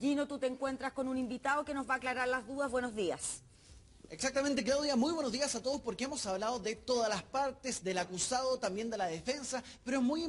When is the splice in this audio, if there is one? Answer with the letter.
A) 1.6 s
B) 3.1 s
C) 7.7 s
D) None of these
B